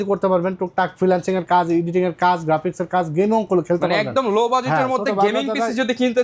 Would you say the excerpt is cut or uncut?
uncut